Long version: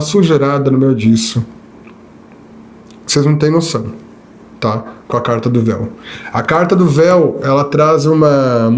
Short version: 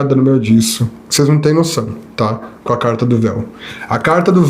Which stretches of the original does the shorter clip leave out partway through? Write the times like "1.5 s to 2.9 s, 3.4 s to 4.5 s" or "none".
1.5 s to 2.9 s, 4.0 s to 4.4 s